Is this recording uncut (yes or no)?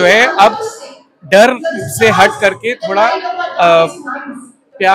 yes